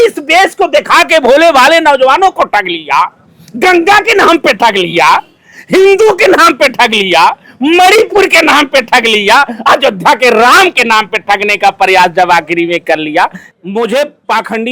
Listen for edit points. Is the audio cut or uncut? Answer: cut